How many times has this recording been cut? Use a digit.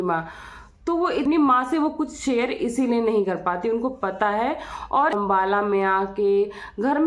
2